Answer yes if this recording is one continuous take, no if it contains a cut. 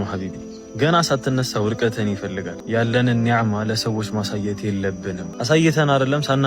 no